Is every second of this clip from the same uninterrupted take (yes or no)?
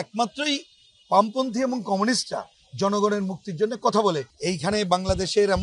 no